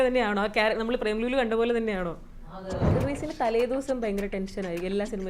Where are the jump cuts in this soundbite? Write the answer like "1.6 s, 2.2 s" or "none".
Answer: 2.9 s